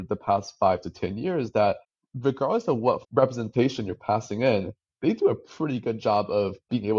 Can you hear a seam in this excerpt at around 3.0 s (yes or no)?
yes